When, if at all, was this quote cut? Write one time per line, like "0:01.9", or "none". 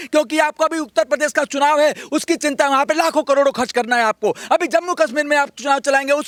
none